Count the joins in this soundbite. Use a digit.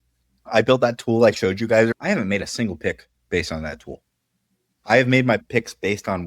2